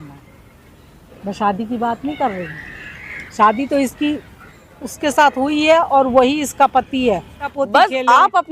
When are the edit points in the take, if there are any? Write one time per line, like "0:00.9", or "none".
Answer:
0:07.5